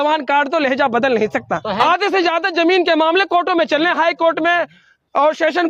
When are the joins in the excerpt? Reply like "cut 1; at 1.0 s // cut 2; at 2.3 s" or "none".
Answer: cut 1; at 1.7 s